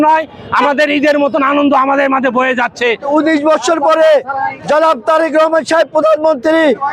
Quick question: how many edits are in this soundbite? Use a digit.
1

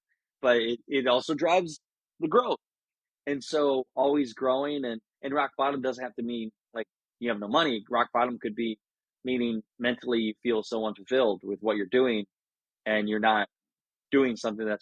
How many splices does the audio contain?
0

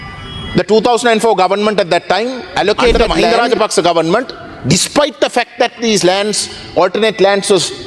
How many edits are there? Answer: 1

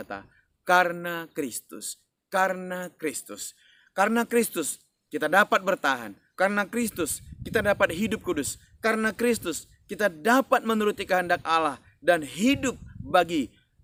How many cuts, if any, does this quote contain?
0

